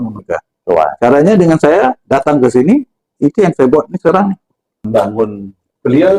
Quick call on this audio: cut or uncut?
cut